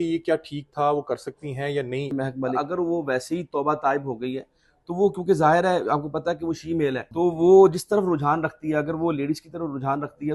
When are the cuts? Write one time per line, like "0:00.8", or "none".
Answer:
0:02.3
0:07.0